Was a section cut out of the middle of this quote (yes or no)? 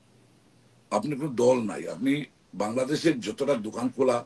no